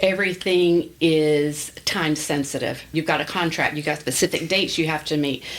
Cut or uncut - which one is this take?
cut